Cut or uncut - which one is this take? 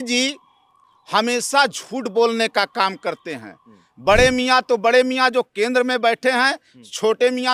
uncut